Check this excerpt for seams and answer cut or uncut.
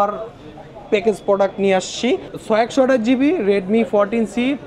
uncut